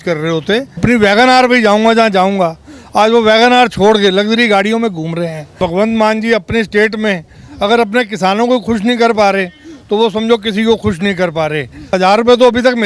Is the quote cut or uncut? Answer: cut